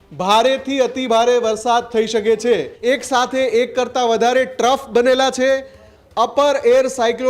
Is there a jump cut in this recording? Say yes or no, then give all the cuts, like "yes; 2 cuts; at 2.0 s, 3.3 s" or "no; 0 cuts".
yes; 1 cut; at 2.7 s